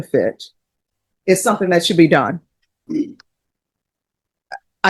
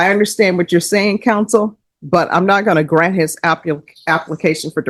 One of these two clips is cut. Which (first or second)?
first